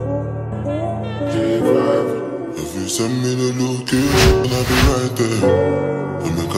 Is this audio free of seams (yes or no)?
no